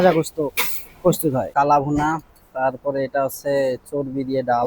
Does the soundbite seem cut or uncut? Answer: cut